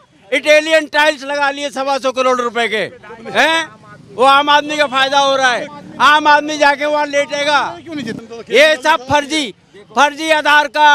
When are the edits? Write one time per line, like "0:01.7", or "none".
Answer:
0:08.1